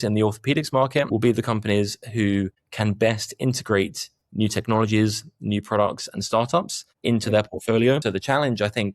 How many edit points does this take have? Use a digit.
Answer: 2